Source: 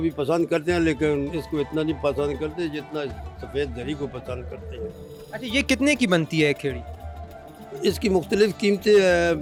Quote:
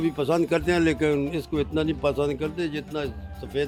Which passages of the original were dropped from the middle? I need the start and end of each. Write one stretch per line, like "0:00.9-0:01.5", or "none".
none